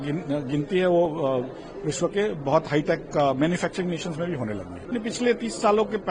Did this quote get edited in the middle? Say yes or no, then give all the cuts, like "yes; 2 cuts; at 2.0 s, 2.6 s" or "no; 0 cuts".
yes; 1 cut; at 4.8 s